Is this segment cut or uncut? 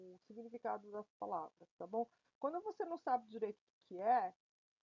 uncut